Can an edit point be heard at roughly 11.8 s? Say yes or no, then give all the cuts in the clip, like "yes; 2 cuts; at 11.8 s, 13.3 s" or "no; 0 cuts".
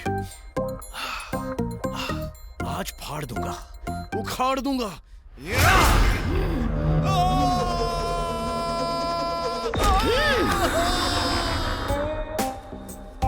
yes; 1 cut; at 11.8 s